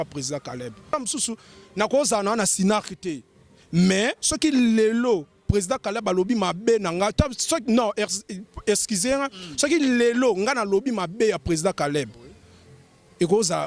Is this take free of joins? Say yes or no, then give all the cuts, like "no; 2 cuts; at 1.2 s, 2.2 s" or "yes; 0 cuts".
no; 1 cut; at 0.9 s